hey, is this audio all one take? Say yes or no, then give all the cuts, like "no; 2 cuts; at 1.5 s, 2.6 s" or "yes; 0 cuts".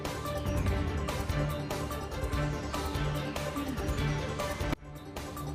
yes; 0 cuts